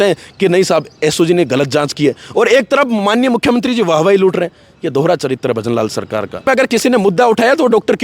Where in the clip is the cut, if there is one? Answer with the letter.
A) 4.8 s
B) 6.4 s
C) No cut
B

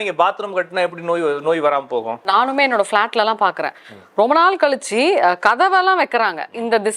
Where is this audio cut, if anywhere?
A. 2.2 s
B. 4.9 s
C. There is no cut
A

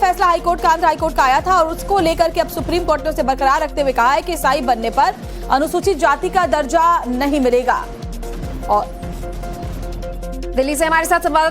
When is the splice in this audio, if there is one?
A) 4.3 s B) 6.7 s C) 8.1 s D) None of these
A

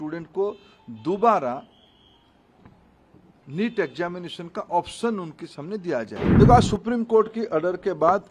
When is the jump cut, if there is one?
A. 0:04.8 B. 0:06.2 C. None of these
B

